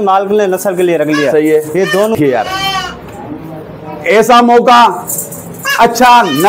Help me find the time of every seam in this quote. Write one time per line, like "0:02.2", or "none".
0:02.1